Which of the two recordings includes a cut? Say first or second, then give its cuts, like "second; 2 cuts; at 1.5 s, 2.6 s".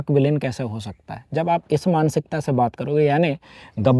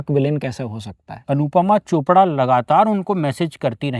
second; 1 cut; at 1.2 s